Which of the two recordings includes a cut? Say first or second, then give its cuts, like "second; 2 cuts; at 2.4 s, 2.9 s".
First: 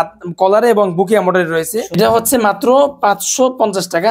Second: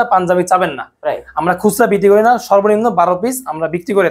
first; 1 cut; at 1.9 s